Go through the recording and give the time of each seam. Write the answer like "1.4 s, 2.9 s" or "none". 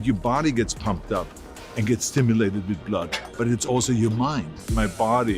4.5 s